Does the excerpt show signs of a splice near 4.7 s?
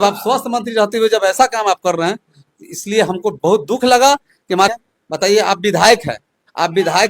yes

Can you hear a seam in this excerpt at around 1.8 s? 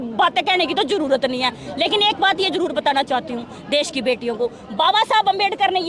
no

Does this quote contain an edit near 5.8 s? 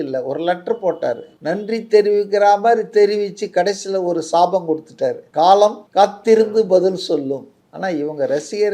yes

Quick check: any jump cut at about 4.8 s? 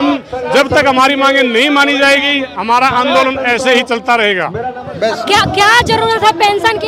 yes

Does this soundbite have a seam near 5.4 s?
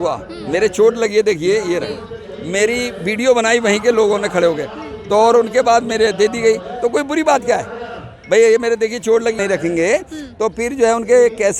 no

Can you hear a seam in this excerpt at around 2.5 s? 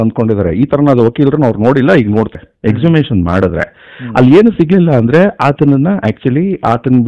yes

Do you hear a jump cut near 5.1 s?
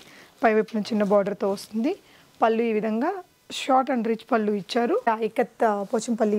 yes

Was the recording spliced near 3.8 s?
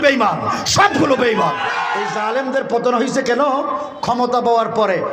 no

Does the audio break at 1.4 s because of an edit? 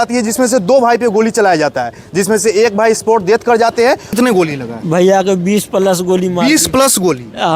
no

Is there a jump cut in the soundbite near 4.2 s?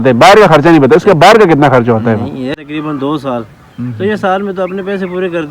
no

